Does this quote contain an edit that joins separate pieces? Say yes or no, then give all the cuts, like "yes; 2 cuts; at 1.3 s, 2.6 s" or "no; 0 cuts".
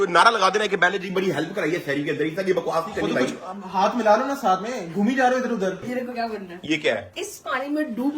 yes; 1 cut; at 5.8 s